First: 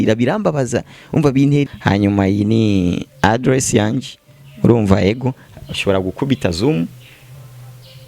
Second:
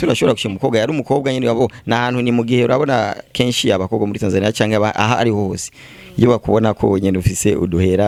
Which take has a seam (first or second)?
first